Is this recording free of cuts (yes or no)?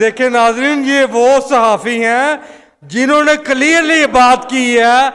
yes